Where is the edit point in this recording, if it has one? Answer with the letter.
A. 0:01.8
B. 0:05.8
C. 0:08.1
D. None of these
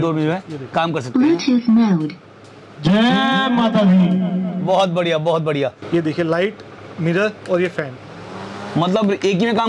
B